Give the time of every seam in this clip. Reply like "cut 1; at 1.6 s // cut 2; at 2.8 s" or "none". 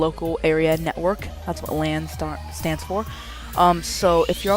none